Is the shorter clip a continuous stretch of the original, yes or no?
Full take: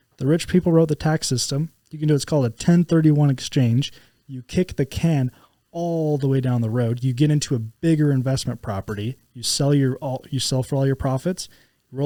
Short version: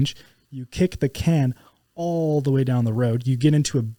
yes